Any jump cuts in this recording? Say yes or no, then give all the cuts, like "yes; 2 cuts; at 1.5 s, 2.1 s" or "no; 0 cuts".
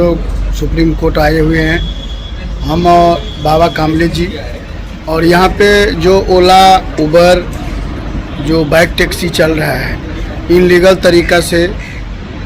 no; 0 cuts